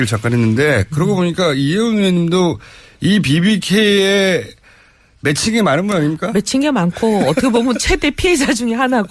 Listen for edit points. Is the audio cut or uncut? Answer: cut